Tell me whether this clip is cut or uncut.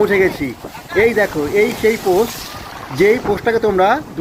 uncut